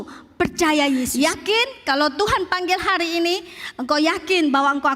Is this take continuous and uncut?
no; 1 cut; at 1.1 s

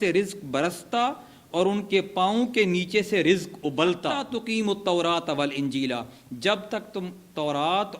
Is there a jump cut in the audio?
yes; 1 cut; at 4.2 s

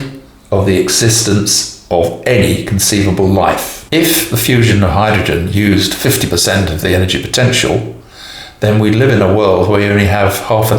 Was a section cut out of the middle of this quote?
yes; 1 cut; at 3.7 s

